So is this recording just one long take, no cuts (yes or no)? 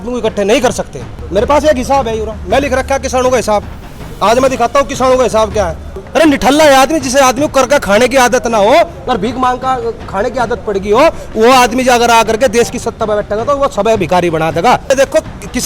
no